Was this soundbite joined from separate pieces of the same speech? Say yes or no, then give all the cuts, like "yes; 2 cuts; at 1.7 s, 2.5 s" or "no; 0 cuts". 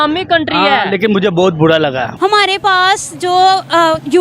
yes; 1 cut; at 2.1 s